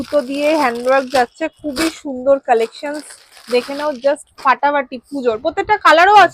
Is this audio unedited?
yes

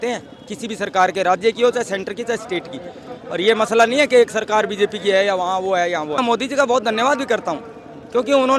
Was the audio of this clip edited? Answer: no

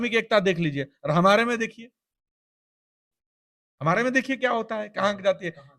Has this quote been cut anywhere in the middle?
no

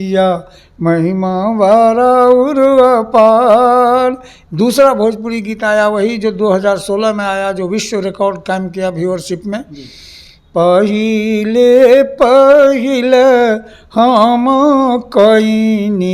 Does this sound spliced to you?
yes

